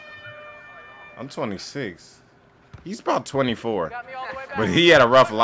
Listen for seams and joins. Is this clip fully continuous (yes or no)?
yes